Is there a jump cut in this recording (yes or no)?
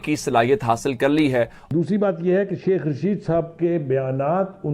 yes